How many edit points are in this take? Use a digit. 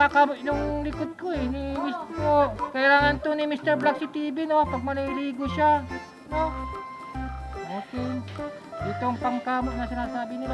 1